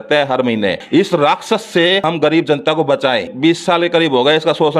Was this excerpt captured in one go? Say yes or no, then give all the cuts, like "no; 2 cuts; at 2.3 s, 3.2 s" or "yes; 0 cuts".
no; 3 cuts; at 0.8 s, 2.0 s, 3.3 s